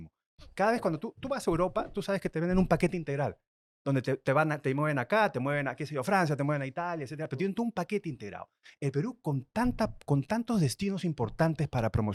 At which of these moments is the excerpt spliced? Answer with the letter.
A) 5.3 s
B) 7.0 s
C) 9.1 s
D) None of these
D